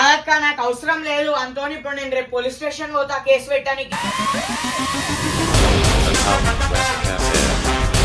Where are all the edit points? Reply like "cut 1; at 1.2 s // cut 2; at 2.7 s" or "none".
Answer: none